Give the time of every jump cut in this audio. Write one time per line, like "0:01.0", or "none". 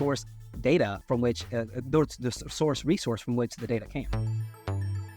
0:04.1